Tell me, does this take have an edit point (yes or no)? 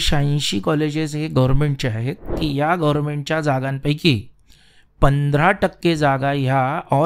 yes